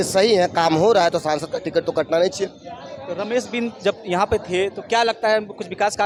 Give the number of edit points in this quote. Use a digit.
0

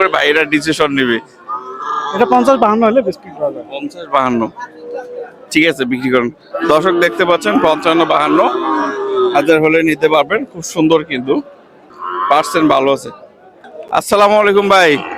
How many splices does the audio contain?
0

